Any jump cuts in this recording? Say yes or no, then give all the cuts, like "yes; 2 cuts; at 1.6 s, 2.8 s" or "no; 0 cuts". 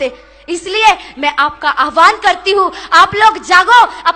no; 0 cuts